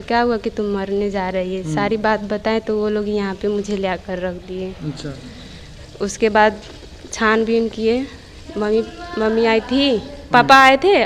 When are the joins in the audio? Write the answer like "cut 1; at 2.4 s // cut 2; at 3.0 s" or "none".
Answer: none